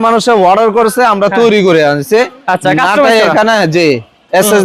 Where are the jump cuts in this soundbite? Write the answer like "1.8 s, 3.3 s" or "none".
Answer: none